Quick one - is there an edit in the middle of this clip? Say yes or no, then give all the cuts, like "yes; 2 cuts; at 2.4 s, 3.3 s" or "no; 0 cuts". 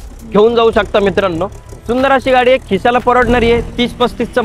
no; 0 cuts